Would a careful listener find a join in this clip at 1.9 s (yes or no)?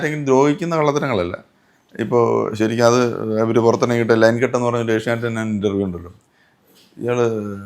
no